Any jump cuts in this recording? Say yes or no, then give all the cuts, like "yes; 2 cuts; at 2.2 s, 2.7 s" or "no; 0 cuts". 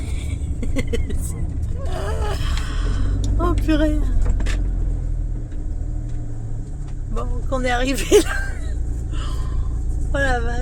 no; 0 cuts